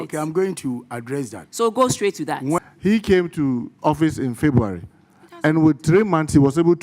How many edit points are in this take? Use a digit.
1